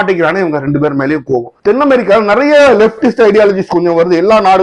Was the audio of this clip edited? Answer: yes; 1 cut; at 1.5 s

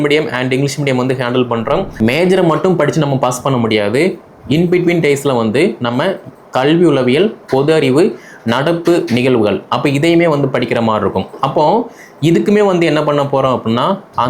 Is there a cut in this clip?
yes; 1 cut; at 1.9 s

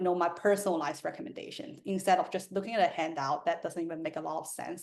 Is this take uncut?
yes; 0 cuts

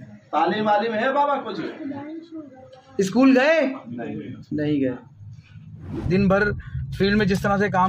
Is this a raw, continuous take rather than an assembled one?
no; 1 cut; at 6.0 s

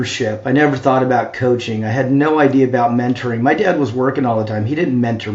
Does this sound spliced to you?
no; 0 cuts

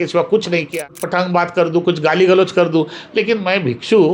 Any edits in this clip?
yes; 1 cut; at 1.0 s

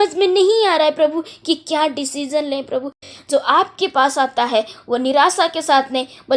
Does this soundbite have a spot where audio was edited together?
yes; 1 cut; at 3.1 s

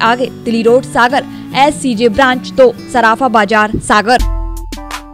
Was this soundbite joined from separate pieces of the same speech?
yes; 1 cut; at 4.2 s

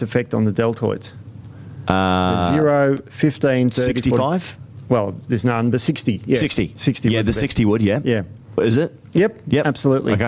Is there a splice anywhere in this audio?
no; 0 cuts

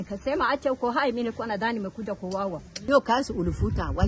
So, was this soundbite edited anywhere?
yes; 1 cut; at 2.7 s

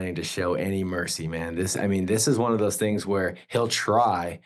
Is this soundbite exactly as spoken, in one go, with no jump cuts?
yes; 0 cuts

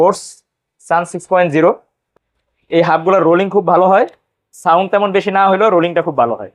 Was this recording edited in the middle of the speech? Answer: yes; 1 cut; at 2.0 s

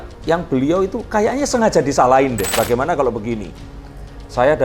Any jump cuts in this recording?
yes; 1 cut; at 2.4 s

